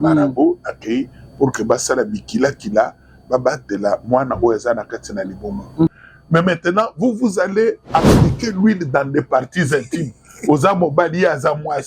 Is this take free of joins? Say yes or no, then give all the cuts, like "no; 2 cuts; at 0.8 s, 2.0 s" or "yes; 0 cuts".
no; 1 cut; at 5.9 s